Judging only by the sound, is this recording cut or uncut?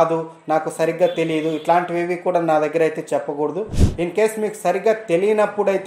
uncut